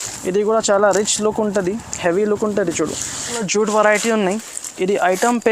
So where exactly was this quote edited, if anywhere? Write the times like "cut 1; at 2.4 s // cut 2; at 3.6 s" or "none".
cut 1; at 3.5 s